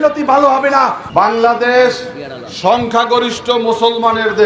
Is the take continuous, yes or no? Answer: no